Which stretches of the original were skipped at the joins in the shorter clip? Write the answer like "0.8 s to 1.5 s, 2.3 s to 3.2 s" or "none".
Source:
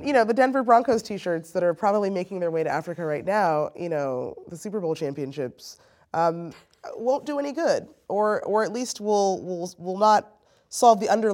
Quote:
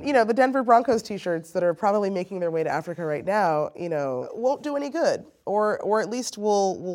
4.3 s to 6.9 s